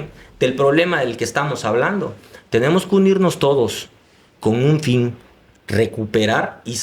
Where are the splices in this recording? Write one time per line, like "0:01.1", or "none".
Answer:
none